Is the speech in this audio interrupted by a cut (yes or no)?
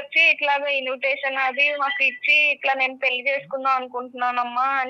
no